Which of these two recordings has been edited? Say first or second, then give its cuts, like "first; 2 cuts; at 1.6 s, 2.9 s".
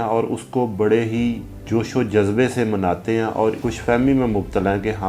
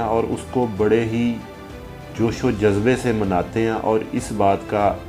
first; 2 cuts; at 1.5 s, 3.6 s